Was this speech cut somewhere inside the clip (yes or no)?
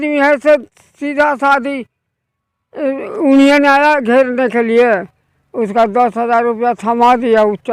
no